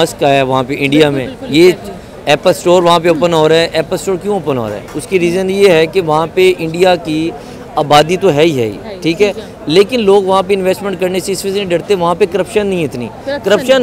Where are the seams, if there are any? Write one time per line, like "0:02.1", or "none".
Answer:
none